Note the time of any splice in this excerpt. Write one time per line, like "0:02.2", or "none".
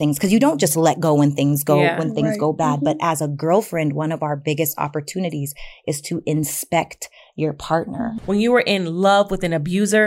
0:08.2

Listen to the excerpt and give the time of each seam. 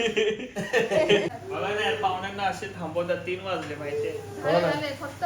0:01.3

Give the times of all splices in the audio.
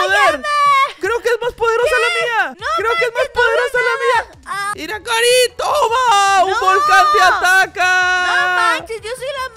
0:02.6
0:04.6

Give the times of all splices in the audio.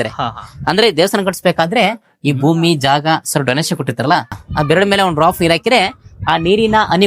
0:04.4

